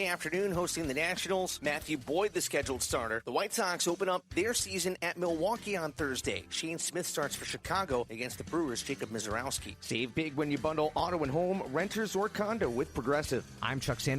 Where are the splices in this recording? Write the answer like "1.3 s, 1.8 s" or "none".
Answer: 9.7 s